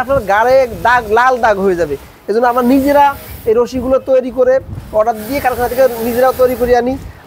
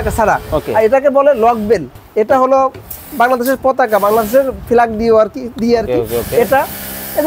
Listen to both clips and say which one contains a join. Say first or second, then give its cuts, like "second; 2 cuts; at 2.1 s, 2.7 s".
second; 1 cut; at 2.0 s